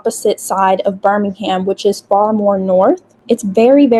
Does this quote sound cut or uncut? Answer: uncut